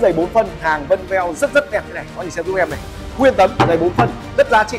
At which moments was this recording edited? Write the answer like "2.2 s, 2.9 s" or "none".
none